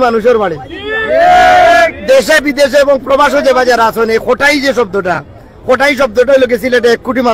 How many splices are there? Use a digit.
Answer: 0